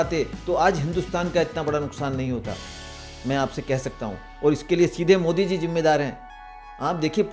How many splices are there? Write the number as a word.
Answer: zero